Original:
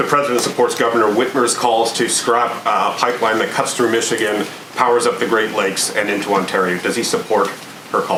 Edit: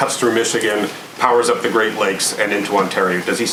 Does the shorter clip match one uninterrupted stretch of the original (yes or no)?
yes